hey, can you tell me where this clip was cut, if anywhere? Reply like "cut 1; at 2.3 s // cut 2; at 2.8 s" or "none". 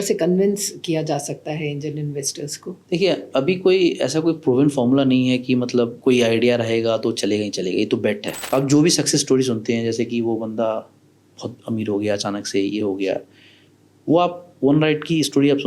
cut 1; at 8.3 s

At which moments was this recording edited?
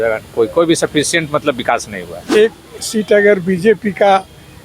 cut 1; at 2.2 s

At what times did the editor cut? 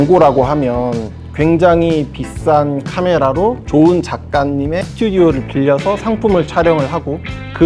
none

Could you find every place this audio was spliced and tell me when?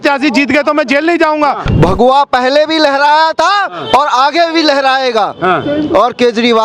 cut 1; at 1.7 s

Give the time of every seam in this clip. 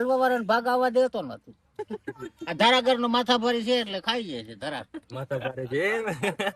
none

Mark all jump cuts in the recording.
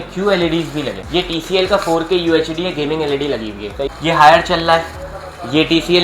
cut 1; at 1.0 s // cut 2; at 3.8 s

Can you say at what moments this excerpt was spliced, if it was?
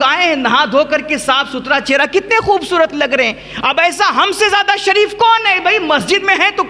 none

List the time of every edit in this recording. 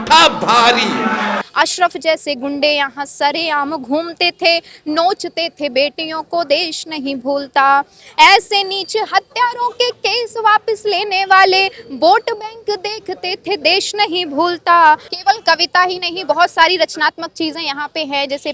cut 1; at 1.4 s // cut 2; at 15.1 s

